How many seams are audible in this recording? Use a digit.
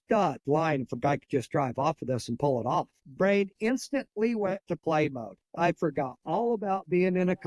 1